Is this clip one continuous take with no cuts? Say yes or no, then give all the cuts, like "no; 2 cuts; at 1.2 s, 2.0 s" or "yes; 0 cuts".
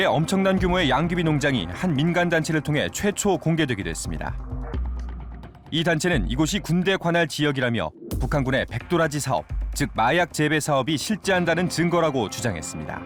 yes; 0 cuts